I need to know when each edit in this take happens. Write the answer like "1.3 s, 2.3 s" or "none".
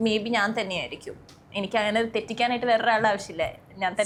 none